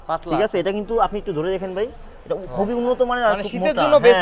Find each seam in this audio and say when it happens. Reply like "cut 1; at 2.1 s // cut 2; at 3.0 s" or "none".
none